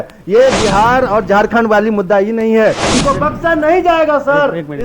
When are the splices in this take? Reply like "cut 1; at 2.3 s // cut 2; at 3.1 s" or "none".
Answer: cut 1; at 2.9 s